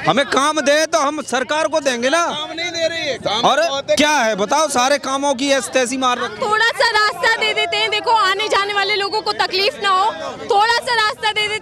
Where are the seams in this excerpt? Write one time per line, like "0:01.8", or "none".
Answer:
none